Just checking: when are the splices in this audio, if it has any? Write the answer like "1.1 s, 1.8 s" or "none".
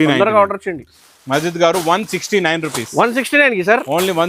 1.0 s